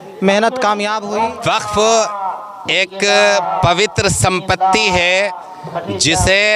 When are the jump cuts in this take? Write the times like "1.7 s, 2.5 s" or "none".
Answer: 1.0 s